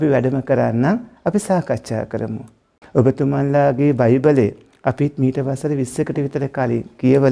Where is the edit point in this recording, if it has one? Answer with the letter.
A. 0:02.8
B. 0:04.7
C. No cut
A